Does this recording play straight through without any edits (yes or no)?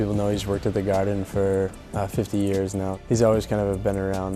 no